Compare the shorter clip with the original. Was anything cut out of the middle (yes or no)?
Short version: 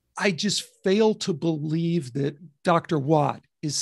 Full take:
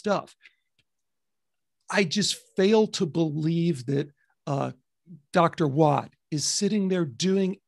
yes